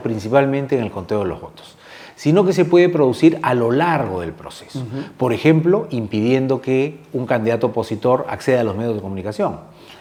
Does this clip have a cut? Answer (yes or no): no